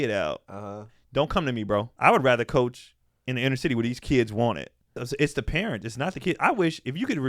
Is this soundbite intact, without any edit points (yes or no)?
no